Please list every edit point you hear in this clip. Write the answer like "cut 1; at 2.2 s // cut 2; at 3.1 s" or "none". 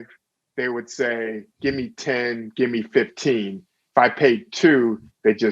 cut 1; at 1.5 s